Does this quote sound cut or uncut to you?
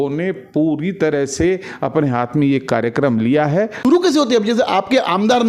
cut